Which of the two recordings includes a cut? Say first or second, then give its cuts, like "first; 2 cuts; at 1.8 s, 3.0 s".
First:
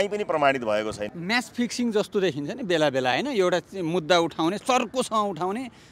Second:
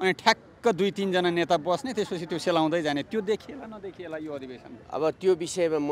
first; 1 cut; at 1.1 s